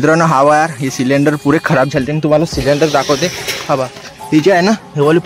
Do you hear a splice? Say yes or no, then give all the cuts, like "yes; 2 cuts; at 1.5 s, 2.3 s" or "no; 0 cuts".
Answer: no; 0 cuts